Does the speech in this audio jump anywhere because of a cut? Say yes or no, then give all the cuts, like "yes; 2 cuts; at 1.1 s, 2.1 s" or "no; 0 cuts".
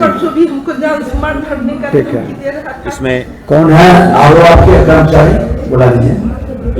no; 0 cuts